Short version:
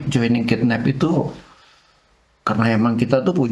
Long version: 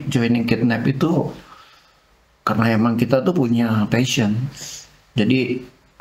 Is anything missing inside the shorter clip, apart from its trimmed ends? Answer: no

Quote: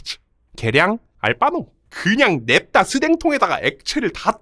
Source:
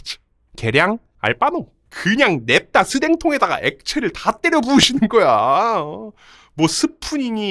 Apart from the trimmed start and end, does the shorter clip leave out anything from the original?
no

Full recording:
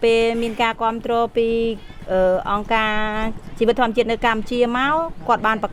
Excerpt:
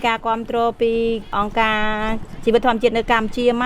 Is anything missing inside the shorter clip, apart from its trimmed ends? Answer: yes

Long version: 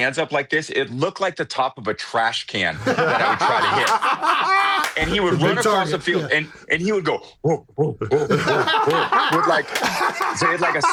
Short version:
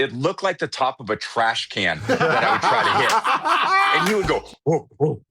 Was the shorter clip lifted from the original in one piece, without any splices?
no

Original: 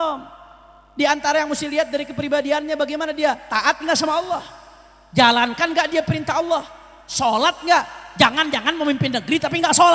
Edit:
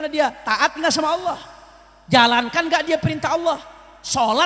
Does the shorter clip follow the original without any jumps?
yes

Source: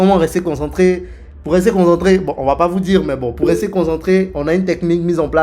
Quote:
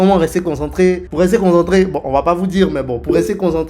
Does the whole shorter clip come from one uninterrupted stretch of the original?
no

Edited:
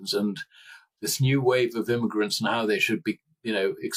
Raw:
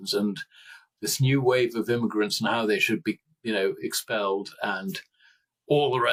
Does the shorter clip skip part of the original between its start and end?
no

